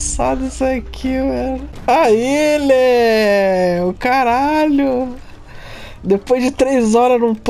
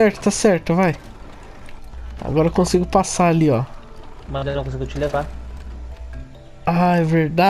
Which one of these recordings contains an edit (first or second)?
first